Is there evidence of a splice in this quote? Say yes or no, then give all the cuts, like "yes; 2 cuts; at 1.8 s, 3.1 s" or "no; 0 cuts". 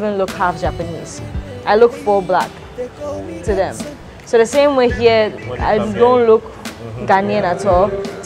no; 0 cuts